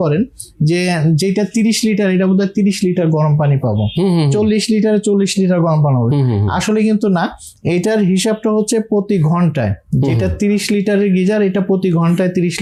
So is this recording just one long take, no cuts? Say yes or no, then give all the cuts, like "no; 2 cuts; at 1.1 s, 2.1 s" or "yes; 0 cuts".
yes; 0 cuts